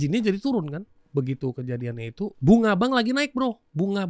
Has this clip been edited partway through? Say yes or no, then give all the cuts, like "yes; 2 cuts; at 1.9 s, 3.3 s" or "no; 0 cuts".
yes; 2 cuts; at 1.0 s, 2.4 s